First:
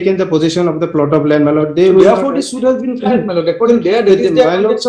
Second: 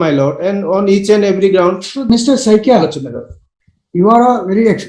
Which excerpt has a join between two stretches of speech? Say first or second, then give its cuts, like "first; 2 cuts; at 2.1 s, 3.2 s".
second; 1 cut; at 2.1 s